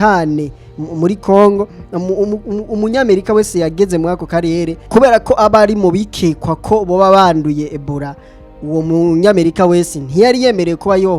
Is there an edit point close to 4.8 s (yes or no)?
yes